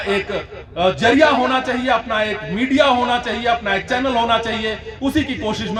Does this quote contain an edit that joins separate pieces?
no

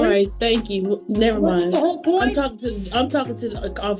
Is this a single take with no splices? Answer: yes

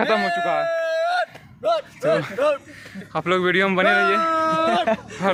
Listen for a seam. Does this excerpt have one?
no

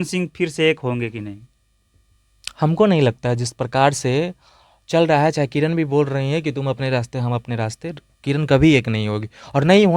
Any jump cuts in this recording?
no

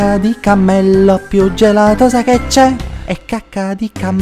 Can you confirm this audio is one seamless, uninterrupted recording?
no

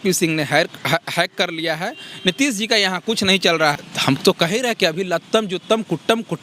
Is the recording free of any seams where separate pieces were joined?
no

